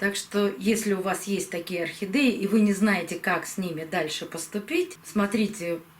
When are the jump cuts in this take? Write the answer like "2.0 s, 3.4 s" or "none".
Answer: 5.0 s

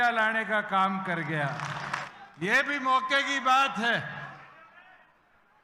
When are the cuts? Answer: 2.0 s

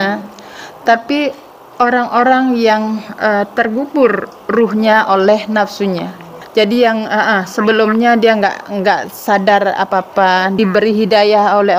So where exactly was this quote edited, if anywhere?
6.3 s, 10.6 s

